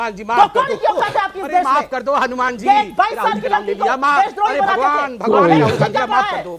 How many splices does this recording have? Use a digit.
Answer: 0